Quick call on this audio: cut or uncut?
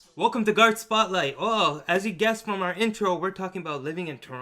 cut